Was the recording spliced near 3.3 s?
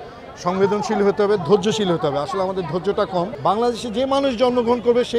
yes; 1 cut; at 3.3 s

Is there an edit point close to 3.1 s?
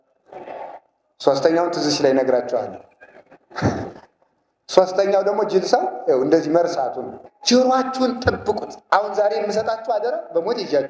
no; 1 cut; at 7.3 s

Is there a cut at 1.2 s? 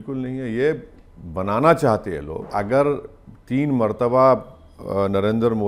no; 1 cut; at 2.5 s

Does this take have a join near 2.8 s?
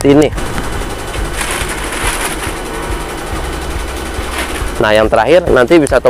no; 0 cuts

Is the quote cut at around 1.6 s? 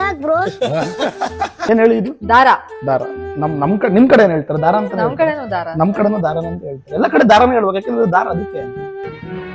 yes; 1 cut; at 1.6 s

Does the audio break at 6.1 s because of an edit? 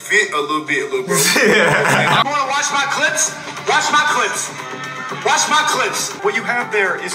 yes; 2 cuts; at 2.2 s, 6.1 s

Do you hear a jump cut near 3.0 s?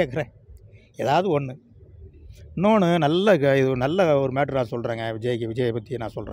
no; 0 cuts

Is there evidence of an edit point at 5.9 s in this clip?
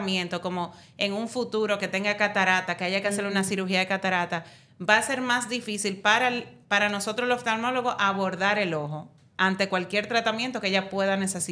no; 0 cuts

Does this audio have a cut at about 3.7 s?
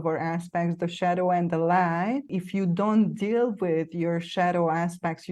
no; 1 cut; at 2.4 s

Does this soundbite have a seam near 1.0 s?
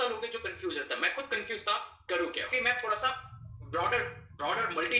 no; 1 cut; at 2.4 s

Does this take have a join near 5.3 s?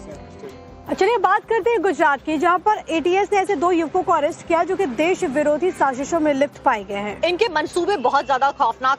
no; 1 cut; at 3.3 s

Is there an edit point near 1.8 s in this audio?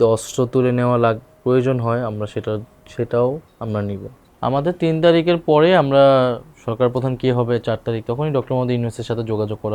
no; 1 cut; at 4.1 s

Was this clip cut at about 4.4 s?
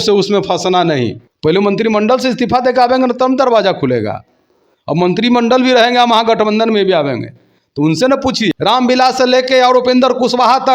no; 2 cuts; at 1.2 s, 8.5 s

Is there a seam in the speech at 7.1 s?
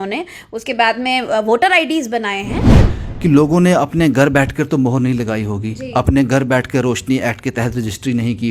no; 1 cut; at 2.8 s

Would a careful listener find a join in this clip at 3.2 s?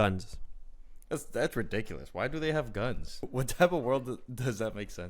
yes; 1 cut; at 3.2 s

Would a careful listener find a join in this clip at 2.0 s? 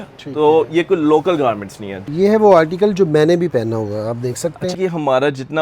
yes; 2 cuts; at 2.0 s, 4.8 s

